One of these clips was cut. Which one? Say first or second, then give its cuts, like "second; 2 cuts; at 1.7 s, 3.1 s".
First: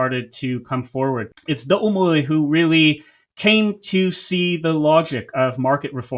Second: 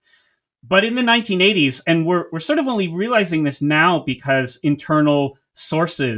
first; 1 cut; at 1.3 s